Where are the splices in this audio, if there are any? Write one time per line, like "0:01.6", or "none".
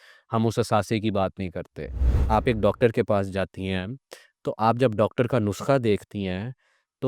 0:02.2